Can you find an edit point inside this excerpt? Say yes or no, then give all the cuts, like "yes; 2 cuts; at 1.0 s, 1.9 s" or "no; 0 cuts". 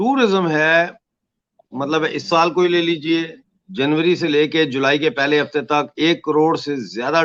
no; 0 cuts